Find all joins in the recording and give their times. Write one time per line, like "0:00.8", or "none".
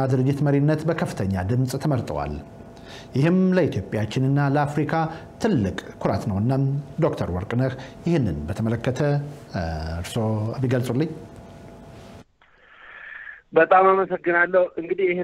none